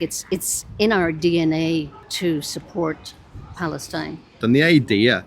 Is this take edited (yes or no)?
yes